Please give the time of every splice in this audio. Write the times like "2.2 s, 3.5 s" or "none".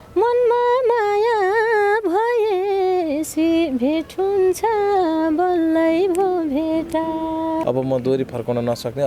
7.6 s